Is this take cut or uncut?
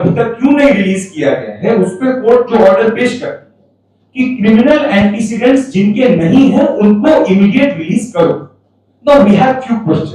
uncut